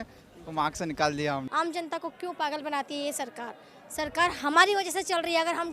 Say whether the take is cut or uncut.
cut